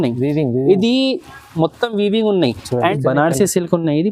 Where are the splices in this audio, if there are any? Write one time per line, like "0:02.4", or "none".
0:02.9